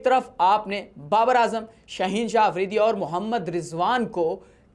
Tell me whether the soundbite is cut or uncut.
uncut